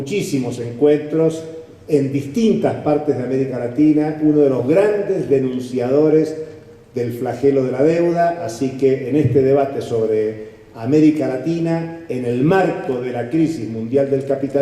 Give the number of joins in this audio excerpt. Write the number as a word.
one